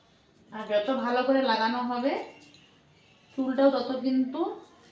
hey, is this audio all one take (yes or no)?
yes